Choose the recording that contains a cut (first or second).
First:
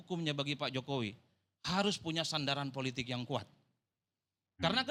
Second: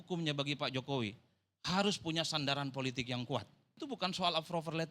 second